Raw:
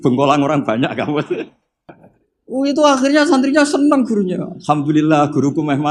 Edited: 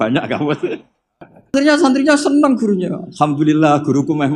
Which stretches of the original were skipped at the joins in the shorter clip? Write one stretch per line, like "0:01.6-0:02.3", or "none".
0:02.2-0:03.0